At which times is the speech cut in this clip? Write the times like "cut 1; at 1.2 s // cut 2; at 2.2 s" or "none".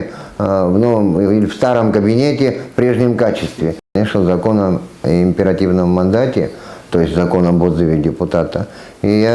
cut 1; at 3.9 s